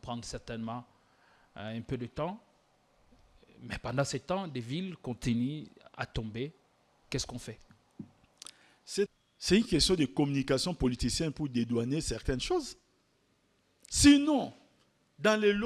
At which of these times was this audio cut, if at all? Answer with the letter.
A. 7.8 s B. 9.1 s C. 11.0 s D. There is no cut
B